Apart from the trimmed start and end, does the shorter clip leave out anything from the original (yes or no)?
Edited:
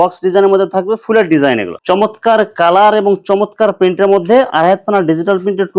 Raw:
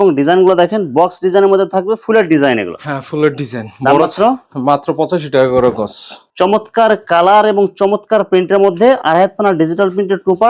yes